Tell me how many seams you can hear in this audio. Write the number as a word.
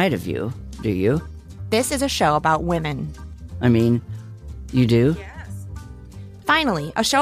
one